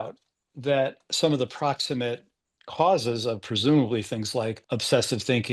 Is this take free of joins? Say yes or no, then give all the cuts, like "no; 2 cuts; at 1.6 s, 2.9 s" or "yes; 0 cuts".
no; 2 cuts; at 1.0 s, 4.6 s